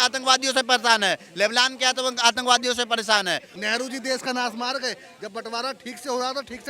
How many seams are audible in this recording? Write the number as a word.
one